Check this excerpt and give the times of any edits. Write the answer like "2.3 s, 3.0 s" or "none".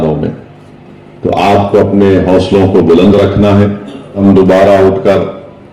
4.2 s